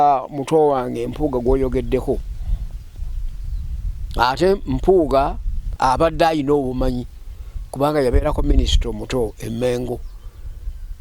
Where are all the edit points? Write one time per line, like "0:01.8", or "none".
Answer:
0:05.8